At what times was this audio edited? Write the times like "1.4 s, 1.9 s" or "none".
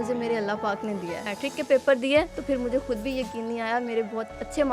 1.3 s